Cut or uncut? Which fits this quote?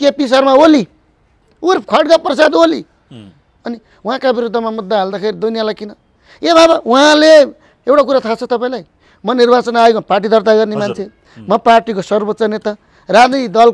uncut